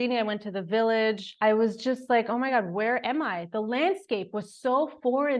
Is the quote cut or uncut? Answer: uncut